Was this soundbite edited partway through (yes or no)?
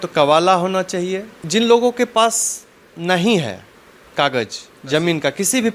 yes